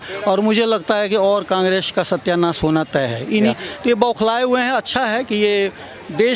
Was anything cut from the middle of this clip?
yes; 1 cut; at 3.5 s

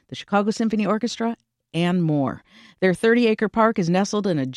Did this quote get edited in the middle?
no; 0 cuts

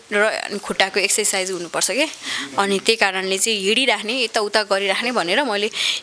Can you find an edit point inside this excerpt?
no; 0 cuts

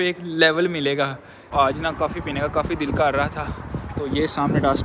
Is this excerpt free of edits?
no; 1 cut; at 1.5 s

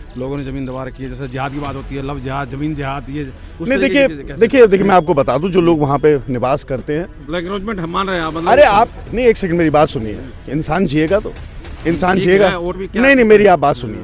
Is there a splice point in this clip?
yes; 2 cuts; at 7.3 s, 12.8 s

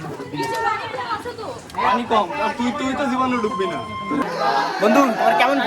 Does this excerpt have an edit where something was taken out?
yes; 1 cut; at 4.2 s

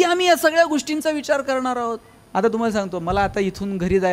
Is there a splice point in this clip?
yes; 1 cut; at 2.1 s

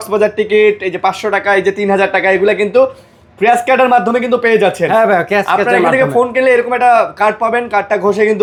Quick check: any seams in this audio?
no; 0 cuts

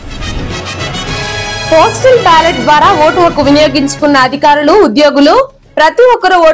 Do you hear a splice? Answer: yes; 1 cut; at 1.7 s

